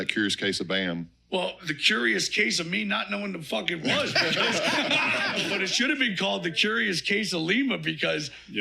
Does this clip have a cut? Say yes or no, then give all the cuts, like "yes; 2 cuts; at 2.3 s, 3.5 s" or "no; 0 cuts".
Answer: yes; 1 cut; at 5.4 s